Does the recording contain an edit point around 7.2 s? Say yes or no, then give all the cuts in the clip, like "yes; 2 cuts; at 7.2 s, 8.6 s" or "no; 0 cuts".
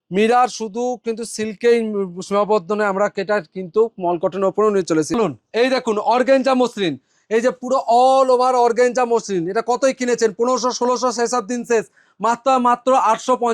no; 1 cut; at 5.1 s